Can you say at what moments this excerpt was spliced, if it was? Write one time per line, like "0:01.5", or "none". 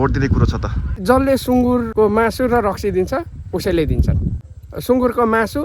0:01.0
0:01.9
0:04.8

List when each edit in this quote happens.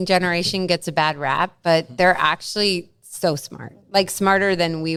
none

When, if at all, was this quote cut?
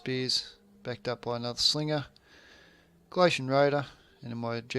0:02.1

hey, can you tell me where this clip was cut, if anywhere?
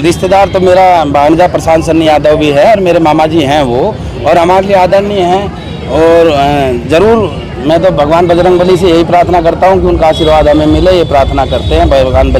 none

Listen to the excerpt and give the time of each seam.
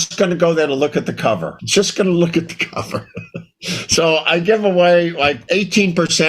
0:01.5

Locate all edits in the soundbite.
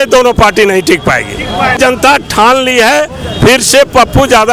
0:01.8

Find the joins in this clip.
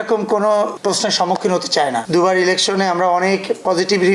0:02.0

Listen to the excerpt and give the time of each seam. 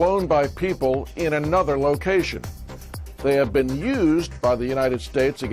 0:01.1

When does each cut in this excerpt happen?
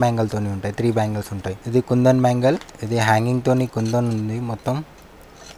0:01.6
0:02.7

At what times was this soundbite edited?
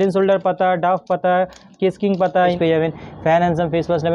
0:02.6

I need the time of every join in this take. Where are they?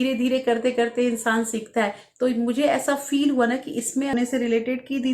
0:04.1

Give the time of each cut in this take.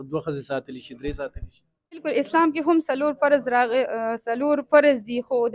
none

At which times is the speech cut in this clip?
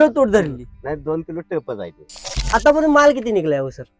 0:02.4

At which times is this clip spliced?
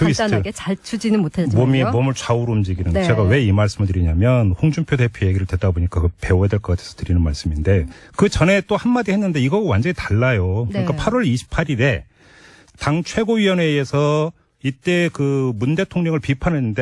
none

